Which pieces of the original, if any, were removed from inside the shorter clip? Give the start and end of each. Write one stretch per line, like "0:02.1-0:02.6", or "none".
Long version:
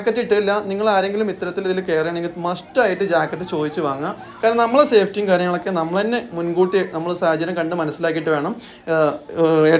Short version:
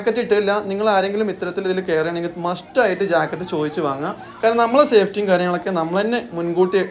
none

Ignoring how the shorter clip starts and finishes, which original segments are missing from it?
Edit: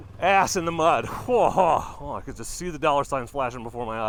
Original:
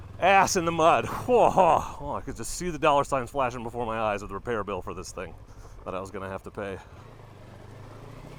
none

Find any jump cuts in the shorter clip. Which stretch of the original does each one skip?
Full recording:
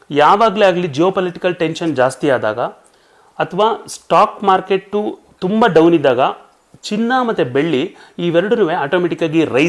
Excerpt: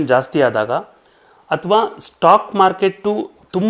none

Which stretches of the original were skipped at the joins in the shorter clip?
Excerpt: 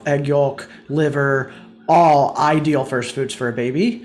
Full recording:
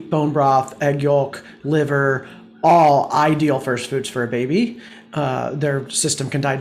none

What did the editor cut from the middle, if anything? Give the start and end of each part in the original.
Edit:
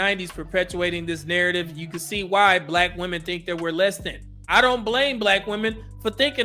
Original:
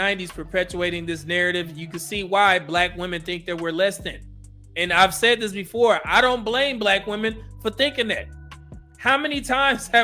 0:04.4-0:06.0

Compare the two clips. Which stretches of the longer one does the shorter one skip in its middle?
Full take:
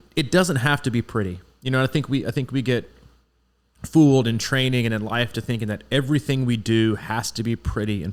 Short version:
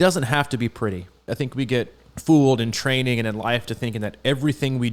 0:01.6-0:02.2
0:03.0-0:03.7

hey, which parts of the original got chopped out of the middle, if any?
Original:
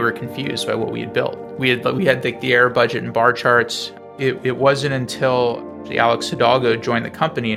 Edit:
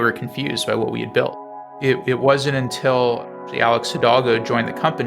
0:01.5-0:03.8

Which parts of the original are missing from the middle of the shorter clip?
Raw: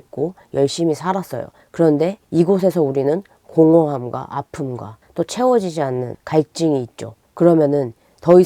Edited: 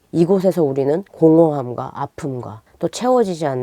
0:03.3-0:03.4

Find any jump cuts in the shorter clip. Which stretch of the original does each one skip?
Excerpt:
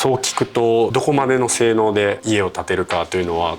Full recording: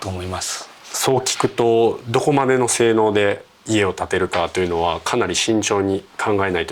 0:01.9-0:02.1
0:03.4-0:03.6

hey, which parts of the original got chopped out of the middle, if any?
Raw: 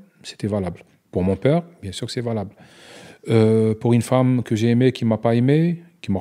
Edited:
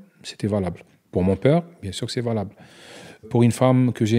0:03.3-0:03.8

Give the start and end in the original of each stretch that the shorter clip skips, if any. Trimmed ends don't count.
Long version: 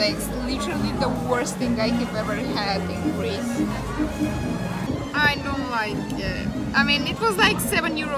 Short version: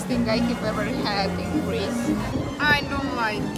0:03.8-0:04.9

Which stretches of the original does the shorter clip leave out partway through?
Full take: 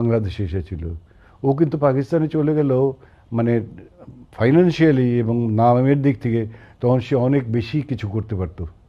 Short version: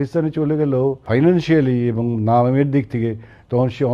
0:03.0-0:04.3

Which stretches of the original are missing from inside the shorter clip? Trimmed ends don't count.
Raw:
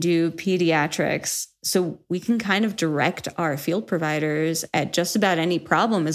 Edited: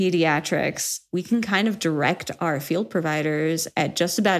0:01.5-0:02.0

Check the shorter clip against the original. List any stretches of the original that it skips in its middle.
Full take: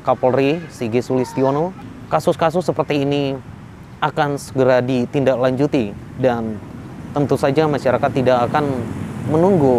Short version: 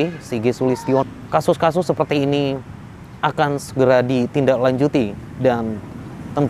0:01.5-0:01.8

